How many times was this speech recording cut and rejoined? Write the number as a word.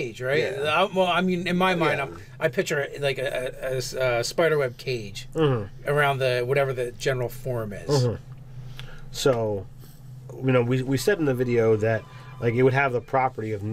zero